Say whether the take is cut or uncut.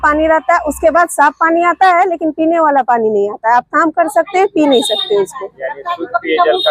uncut